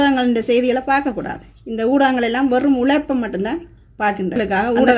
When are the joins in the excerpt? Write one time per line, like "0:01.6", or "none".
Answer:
none